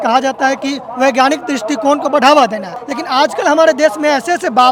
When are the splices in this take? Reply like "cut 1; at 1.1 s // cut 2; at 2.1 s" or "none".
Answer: none